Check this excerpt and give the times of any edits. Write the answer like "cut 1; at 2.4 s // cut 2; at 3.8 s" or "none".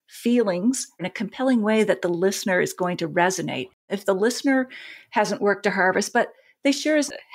cut 1; at 1.0 s // cut 2; at 3.9 s